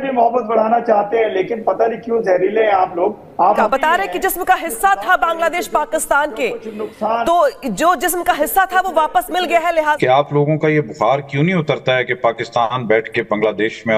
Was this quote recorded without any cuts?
no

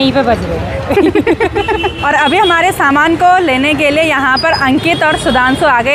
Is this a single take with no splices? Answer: yes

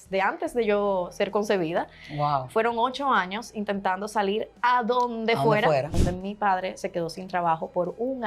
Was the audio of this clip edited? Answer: yes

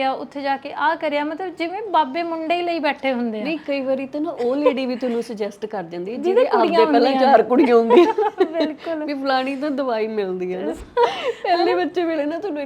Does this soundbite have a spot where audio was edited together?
yes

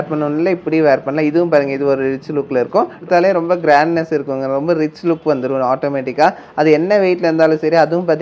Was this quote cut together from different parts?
yes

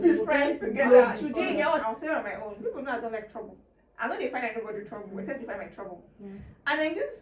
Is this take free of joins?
no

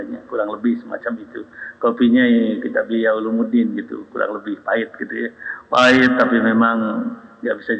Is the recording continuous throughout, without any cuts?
yes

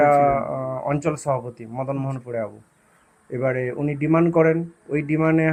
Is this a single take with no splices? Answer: yes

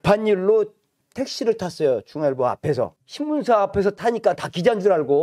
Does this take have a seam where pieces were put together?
yes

